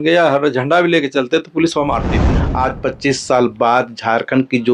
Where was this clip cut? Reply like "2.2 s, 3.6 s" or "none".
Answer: 2.4 s